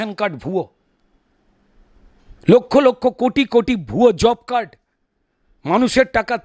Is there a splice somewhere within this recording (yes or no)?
no